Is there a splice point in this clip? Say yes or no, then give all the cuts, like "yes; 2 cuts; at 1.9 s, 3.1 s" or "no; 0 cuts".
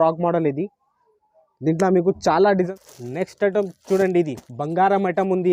yes; 1 cut; at 2.5 s